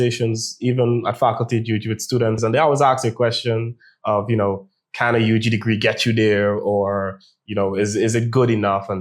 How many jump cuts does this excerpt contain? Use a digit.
1